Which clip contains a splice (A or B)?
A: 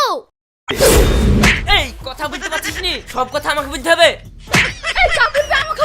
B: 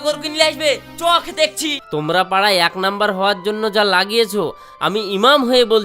B